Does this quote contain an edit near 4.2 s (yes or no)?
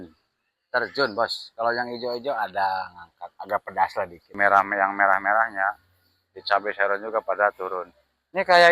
yes